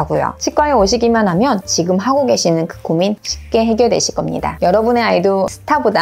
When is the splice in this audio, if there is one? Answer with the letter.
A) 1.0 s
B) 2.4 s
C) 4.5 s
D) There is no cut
C